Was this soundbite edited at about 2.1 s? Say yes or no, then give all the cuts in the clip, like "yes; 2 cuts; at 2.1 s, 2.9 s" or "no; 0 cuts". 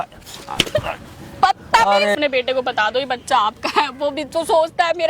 yes; 1 cut; at 2.1 s